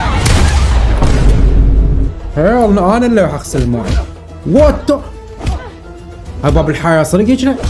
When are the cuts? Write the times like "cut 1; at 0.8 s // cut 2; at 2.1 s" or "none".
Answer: none